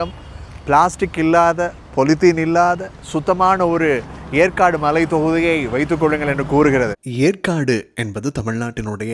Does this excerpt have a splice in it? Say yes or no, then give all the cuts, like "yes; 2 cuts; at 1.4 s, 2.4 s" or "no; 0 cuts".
yes; 1 cut; at 7.0 s